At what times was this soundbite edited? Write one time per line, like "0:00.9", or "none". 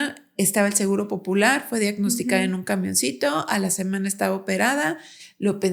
none